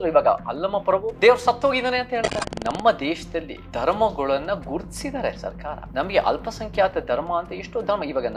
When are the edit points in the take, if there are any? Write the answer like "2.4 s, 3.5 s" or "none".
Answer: 1.1 s, 2.4 s, 3.6 s, 5.8 s